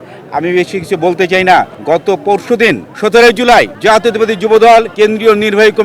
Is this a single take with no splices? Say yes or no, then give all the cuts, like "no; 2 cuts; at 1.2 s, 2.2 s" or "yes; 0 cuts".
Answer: no; 2 cuts; at 2.9 s, 4.9 s